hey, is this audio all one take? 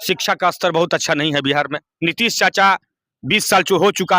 no; 1 cut; at 1.9 s

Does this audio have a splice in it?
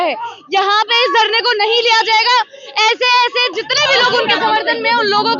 no; 0 cuts

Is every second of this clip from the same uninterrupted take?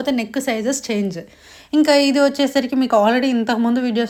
yes; 0 cuts

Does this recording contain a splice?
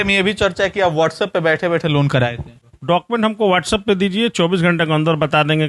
yes; 1 cut; at 2.5 s

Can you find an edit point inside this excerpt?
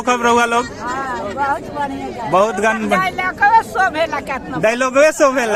no; 0 cuts

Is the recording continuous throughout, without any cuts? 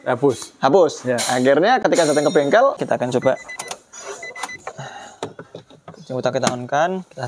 no; 1 cut; at 2.8 s

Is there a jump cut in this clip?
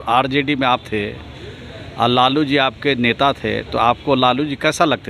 no; 0 cuts

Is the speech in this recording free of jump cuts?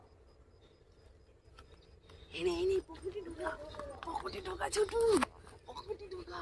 yes; 0 cuts

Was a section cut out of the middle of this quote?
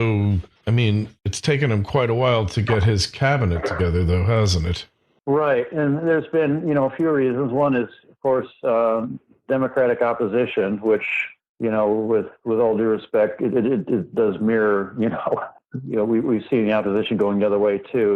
yes; 1 cut; at 12.3 s

